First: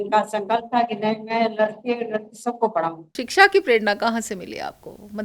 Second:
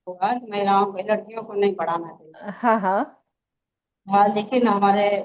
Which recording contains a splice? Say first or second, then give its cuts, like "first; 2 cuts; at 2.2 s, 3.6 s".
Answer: first; 1 cut; at 3.2 s